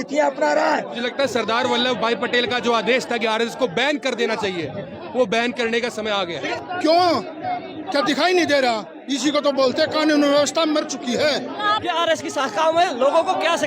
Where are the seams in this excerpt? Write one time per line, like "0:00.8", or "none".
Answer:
0:01.0
0:06.5
0:11.7